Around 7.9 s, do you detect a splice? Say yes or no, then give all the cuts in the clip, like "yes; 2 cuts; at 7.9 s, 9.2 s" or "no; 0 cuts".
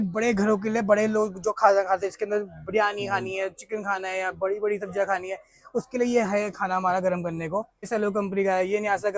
yes; 1 cut; at 7.9 s